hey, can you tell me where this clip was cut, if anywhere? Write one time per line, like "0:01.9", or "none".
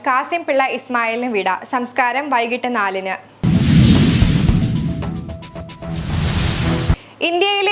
0:03.4
0:05.8

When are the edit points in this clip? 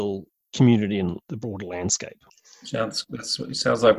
0:01.3

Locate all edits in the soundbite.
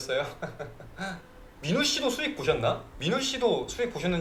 none

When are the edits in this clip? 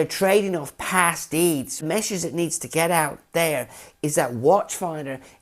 0:01.8

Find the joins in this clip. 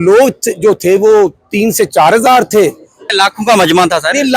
0:03.1

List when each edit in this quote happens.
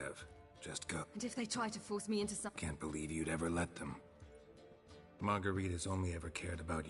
0:01.0
0:02.5

